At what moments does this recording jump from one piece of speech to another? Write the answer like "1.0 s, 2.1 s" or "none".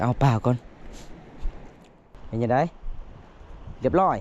2.1 s